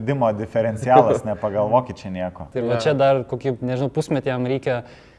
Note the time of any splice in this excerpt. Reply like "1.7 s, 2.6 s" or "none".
2.5 s